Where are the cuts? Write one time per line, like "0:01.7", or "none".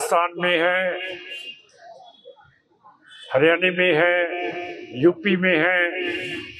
none